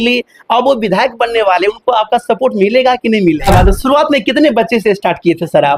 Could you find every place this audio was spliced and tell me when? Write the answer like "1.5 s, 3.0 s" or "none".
3.5 s